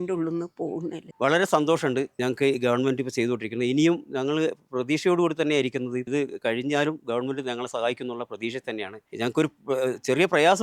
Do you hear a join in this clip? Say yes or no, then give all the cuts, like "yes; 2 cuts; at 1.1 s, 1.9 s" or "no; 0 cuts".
yes; 3 cuts; at 1.0 s, 6.1 s, 9.0 s